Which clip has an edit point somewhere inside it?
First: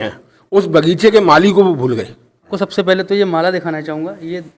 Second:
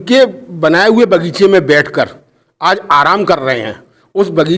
first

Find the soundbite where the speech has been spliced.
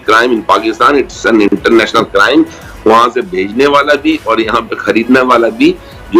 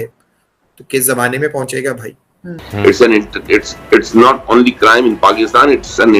second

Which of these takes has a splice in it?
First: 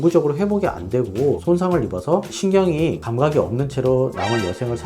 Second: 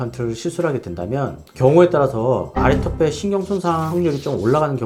first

